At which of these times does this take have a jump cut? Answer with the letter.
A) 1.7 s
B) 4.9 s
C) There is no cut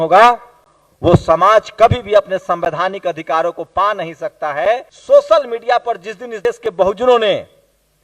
B